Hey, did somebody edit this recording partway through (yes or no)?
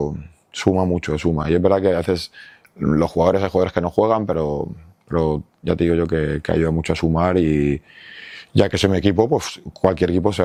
no